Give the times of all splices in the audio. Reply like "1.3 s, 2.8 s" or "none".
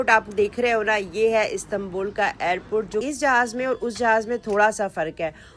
3.0 s